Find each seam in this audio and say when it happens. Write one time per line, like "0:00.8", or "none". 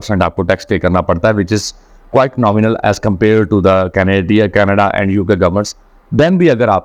none

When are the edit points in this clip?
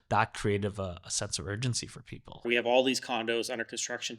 0:02.4

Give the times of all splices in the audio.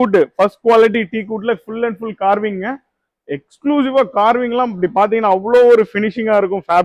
none

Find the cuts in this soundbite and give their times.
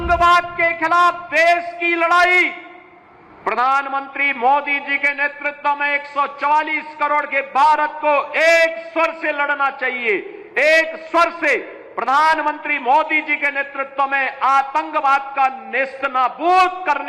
none

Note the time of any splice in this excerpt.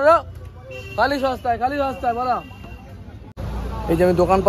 0:03.4

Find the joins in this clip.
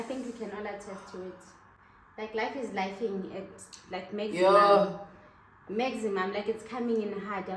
none

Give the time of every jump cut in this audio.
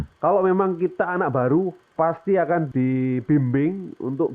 0:02.7

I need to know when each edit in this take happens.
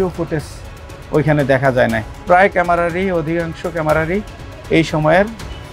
0:02.1

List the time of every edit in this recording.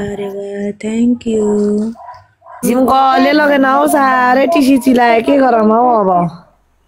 0:02.6

